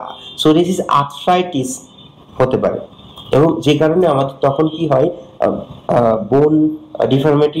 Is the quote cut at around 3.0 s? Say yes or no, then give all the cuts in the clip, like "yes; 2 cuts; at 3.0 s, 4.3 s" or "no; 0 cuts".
no; 0 cuts